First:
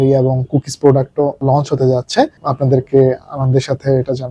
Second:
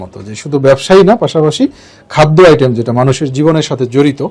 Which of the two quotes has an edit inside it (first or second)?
first